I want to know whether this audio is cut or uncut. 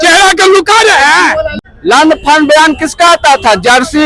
cut